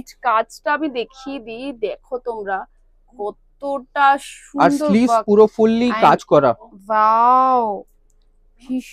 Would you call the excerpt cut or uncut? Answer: uncut